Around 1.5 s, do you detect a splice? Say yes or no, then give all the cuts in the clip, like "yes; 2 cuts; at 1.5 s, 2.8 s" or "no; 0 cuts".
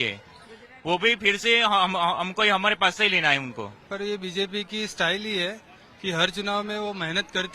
no; 1 cut; at 3.8 s